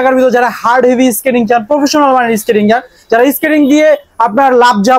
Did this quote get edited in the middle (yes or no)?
no